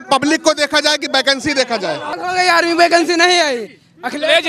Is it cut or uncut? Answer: cut